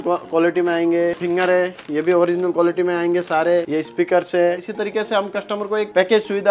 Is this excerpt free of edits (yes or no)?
no